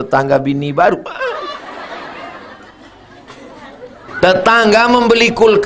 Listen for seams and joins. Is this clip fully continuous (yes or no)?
no